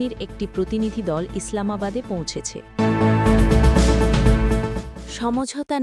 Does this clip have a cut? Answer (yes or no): yes